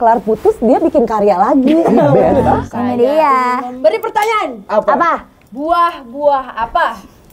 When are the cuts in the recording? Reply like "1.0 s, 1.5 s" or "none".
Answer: 2.5 s